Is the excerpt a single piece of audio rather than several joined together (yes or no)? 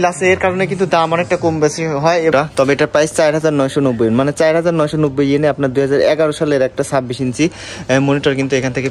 no